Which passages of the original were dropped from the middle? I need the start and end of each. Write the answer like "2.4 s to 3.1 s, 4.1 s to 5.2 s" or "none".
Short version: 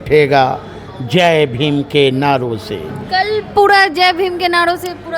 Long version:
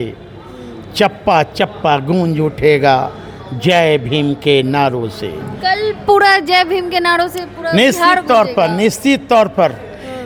none